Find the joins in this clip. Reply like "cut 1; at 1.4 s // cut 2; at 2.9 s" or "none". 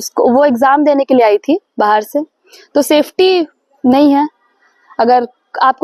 none